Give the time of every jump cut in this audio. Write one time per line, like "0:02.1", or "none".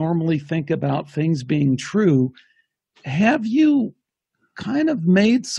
none

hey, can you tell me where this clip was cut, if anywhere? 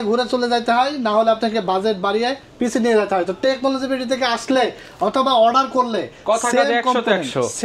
none

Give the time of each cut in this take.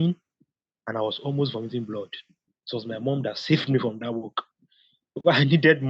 0:02.6

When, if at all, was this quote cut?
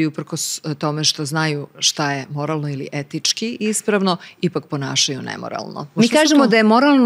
0:05.9

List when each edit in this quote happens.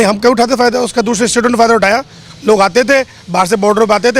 none

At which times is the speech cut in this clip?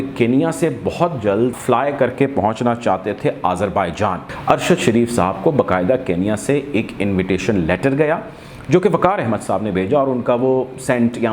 0:01.5
0:04.3

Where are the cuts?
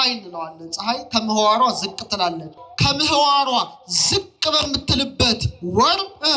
0:02.6

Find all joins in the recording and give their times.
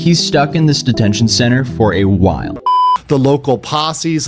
0:02.7

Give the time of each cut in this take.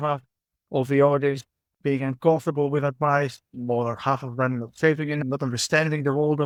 none

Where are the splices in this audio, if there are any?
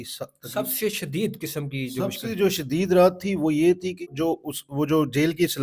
0:04.0

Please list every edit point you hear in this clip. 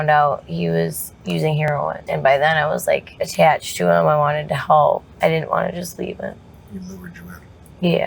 0:01.7
0:03.2
0:05.1
0:06.5

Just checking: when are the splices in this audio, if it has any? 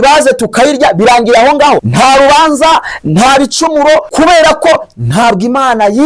0:01.9
0:04.1

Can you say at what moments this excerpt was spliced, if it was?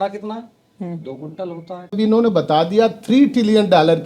0:01.9

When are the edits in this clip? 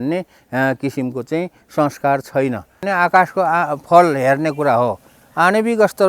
0:02.9

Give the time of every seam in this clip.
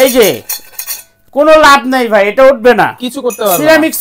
none

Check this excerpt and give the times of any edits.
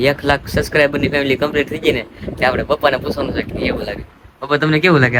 none

